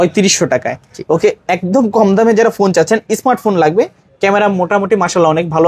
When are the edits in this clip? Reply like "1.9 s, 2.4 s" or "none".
none